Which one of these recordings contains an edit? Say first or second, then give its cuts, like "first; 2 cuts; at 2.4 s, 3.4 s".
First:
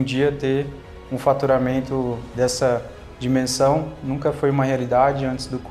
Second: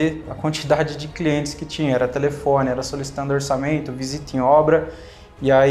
first; 1 cut; at 2.3 s